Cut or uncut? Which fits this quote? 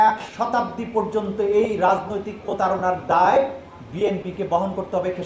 uncut